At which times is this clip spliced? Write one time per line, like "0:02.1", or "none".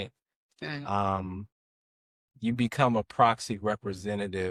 none